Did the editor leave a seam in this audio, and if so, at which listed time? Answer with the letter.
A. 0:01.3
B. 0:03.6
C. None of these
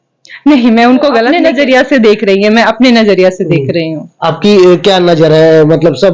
A